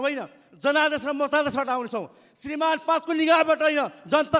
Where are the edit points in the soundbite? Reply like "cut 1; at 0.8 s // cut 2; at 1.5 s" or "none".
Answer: none